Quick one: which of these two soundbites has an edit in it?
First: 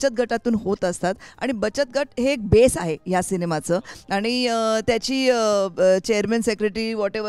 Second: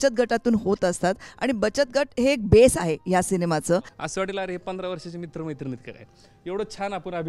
second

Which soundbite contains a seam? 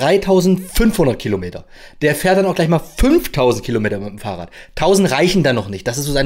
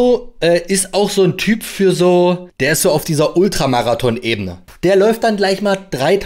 second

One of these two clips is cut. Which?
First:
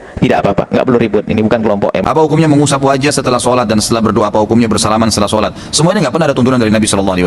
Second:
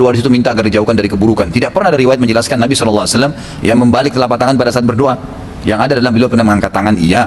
first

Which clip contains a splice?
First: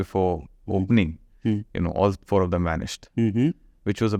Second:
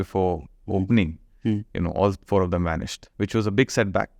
second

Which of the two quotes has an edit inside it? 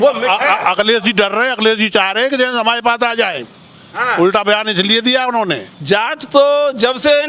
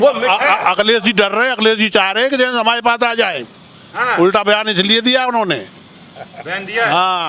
first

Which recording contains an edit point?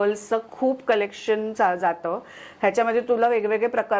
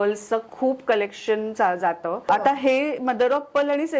second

